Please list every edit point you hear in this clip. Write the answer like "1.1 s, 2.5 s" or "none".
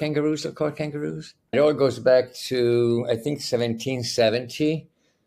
1.5 s